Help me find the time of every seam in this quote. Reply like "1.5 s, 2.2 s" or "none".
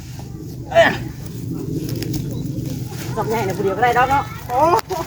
none